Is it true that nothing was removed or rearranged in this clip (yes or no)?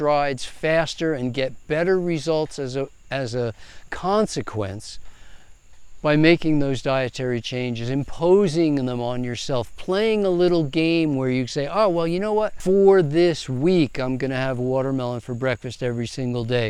yes